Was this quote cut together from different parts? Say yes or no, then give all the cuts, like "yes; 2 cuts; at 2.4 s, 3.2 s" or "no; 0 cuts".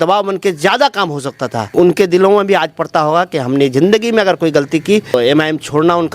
yes; 1 cut; at 1.7 s